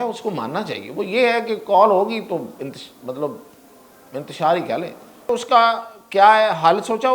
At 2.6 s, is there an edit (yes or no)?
no